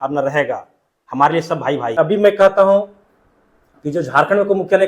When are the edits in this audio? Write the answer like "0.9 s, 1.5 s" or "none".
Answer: 2.0 s